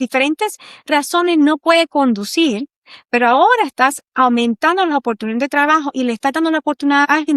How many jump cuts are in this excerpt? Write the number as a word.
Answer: zero